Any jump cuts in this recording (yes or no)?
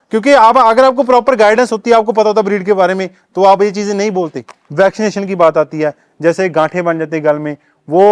yes